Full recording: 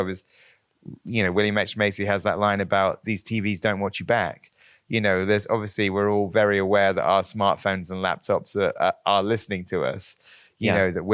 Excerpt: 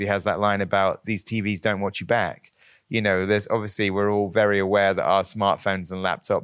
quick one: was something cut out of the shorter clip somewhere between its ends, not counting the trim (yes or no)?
no